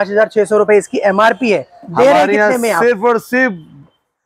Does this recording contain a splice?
no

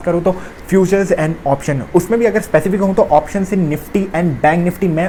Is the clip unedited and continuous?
yes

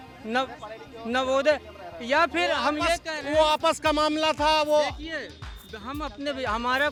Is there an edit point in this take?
no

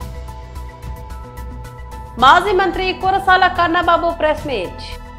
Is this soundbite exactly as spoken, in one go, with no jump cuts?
yes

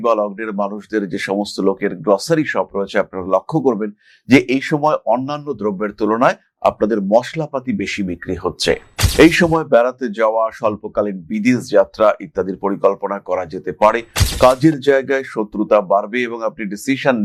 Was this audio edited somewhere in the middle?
no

